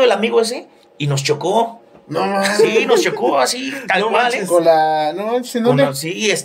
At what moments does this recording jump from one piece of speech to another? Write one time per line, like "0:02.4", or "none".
none